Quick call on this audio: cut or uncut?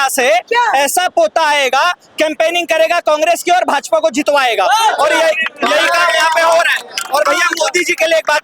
uncut